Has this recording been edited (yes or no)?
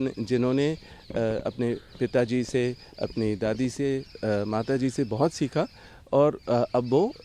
no